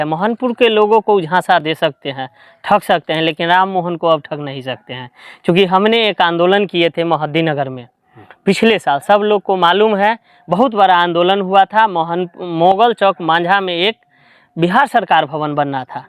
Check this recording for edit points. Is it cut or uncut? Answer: uncut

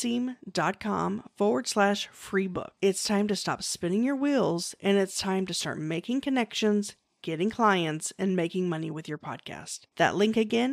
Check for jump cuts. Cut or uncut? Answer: uncut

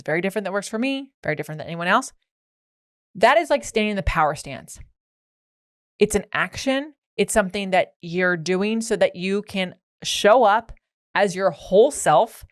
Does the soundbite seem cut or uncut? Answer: uncut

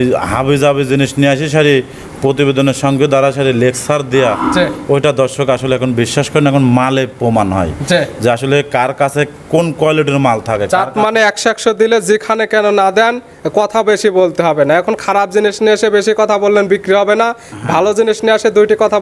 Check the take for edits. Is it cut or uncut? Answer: uncut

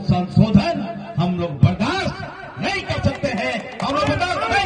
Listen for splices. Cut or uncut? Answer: uncut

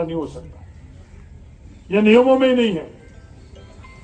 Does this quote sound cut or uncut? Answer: uncut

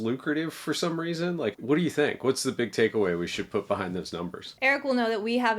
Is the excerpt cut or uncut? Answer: cut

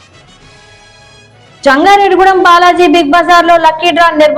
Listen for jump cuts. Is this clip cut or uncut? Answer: cut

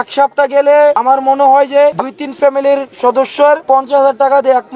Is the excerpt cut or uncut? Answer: cut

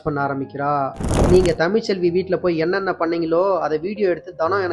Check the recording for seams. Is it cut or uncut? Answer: cut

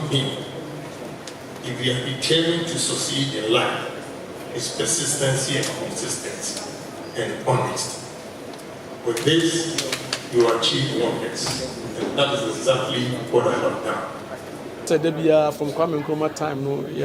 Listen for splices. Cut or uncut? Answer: cut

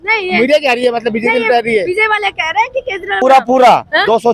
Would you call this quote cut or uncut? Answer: cut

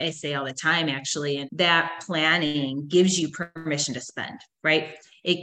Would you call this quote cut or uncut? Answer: cut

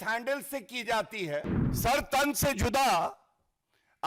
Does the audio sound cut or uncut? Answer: cut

